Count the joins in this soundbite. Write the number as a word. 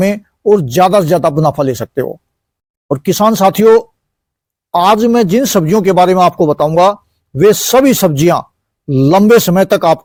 zero